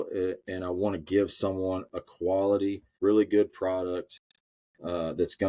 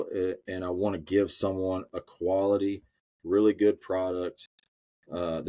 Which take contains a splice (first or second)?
first